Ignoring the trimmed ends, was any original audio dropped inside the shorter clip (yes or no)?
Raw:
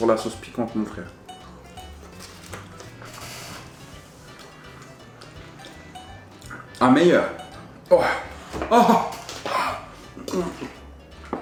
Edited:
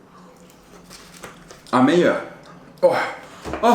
yes